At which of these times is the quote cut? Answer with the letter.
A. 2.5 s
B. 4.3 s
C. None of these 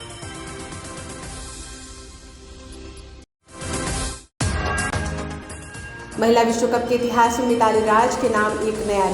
A